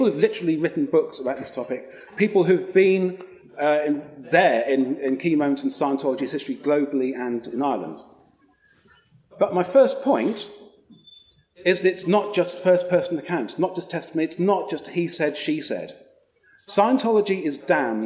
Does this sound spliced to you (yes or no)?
no